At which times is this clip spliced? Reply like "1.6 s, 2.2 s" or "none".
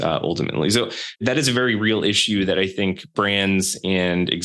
1.2 s, 3.1 s